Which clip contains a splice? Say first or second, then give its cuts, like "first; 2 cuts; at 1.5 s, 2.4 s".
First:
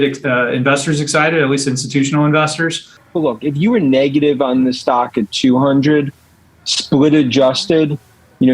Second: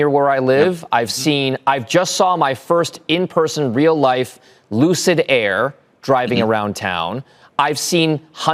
first; 1 cut; at 3.0 s